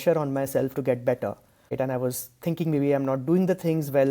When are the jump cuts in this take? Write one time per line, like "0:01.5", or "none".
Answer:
0:01.7